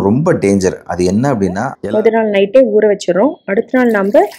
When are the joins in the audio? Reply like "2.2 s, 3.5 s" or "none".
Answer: 1.7 s